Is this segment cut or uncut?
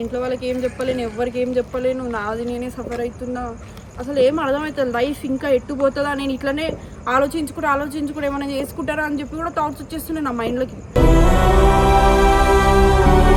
uncut